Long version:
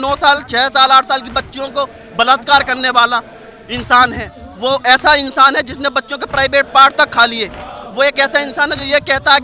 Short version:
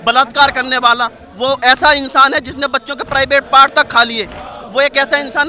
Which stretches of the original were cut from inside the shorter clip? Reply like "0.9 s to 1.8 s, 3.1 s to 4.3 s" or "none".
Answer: 3.3 s to 4.4 s